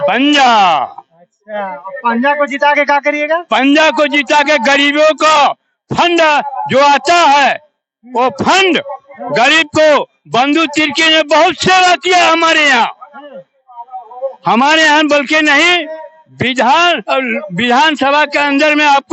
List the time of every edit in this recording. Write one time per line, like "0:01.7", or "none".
none